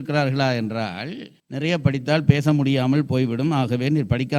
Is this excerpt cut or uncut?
cut